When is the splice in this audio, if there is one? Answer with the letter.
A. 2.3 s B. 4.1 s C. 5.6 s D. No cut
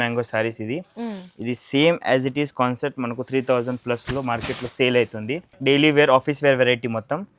C